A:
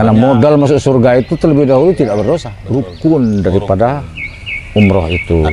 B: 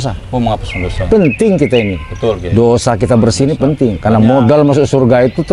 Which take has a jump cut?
A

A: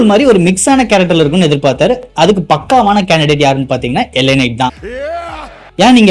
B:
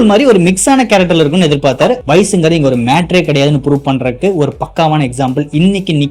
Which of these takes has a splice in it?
B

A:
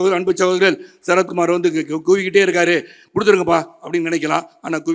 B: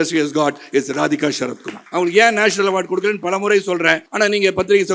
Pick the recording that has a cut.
B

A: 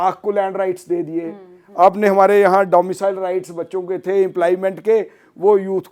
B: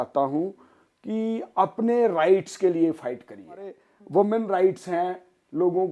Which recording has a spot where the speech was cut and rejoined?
B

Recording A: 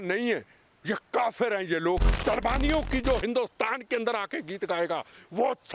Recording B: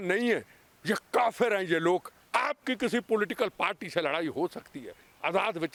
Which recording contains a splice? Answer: A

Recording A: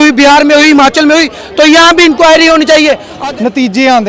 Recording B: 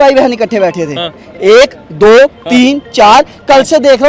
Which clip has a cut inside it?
A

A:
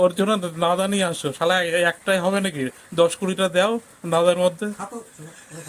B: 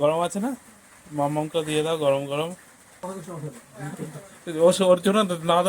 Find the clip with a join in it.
B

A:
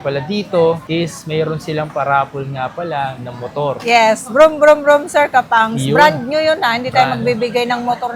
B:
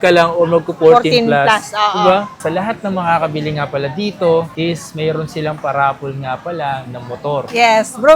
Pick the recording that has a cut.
B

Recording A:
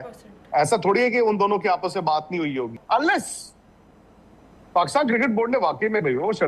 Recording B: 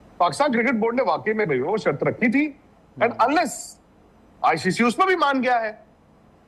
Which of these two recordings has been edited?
A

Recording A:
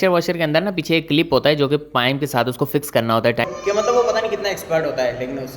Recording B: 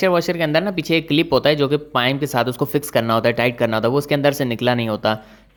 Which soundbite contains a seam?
A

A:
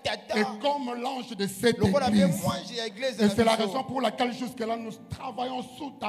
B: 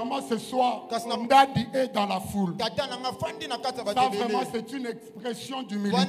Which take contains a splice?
B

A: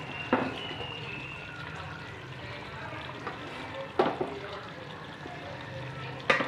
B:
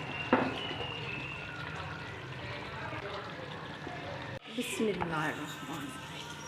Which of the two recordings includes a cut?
B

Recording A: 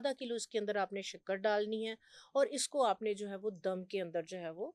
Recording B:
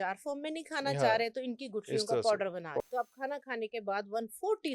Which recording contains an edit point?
B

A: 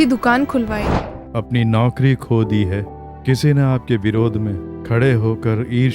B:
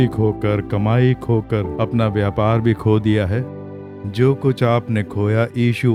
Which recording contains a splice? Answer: A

